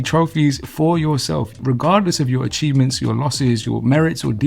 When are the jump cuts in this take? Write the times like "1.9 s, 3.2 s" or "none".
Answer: 1.5 s, 3.6 s